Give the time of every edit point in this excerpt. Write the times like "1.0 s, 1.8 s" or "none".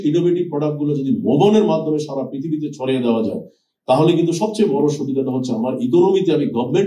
none